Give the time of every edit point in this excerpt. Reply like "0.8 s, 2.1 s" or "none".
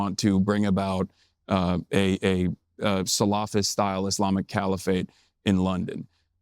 none